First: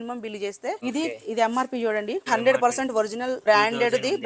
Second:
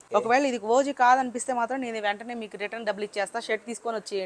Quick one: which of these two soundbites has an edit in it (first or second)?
first